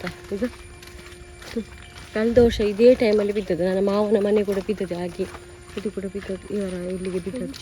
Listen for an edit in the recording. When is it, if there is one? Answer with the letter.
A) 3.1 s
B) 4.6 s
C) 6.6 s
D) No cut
D